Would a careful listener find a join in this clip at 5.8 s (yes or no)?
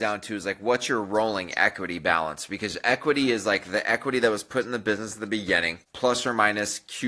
yes